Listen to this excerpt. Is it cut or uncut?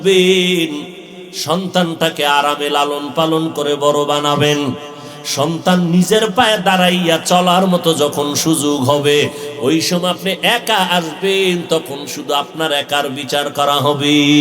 uncut